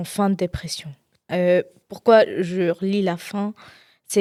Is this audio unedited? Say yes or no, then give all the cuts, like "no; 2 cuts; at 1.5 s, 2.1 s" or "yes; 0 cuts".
yes; 0 cuts